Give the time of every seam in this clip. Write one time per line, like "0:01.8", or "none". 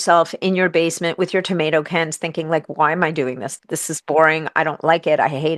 none